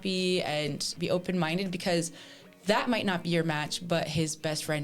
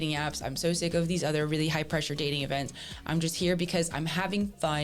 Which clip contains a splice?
first; 1 cut; at 0.9 s

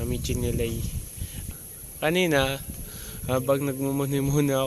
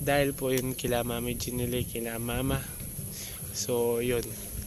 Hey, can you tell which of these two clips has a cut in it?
first; 1 cut; at 1.4 s

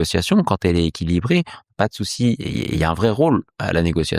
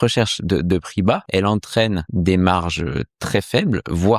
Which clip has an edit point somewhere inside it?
second; 2 cuts; at 1.2 s, 2.1 s

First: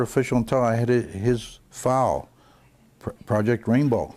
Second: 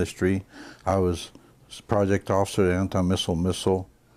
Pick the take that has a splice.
second; 1 cut; at 2.7 s

